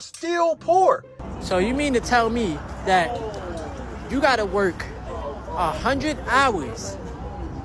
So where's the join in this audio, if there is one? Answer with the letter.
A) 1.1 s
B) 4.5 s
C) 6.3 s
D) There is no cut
A